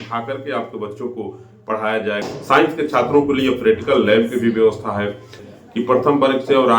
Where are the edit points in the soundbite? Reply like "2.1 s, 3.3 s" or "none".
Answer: 2.2 s, 5.4 s